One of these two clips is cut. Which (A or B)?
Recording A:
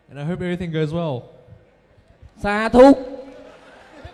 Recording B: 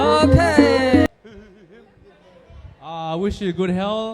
B